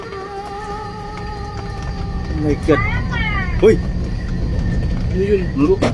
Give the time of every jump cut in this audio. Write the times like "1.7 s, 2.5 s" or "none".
none